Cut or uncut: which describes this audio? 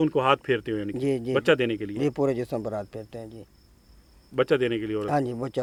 uncut